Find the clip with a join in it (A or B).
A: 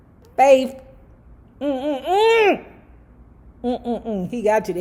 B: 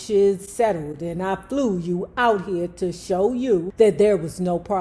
B